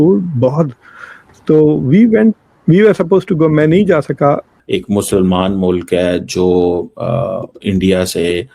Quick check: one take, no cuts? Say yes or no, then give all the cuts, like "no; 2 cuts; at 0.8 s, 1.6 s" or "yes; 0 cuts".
no; 1 cut; at 4.5 s